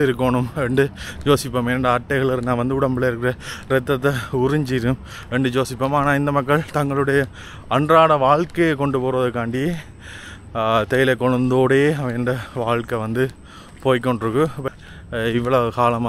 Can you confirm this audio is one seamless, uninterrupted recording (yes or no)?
no